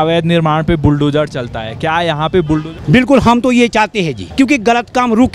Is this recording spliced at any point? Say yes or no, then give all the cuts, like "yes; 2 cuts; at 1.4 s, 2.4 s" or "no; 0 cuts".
yes; 2 cuts; at 2.7 s, 4.2 s